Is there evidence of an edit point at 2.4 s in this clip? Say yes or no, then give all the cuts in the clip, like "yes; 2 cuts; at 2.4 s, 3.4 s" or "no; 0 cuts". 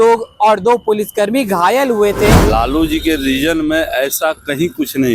yes; 1 cut; at 2.4 s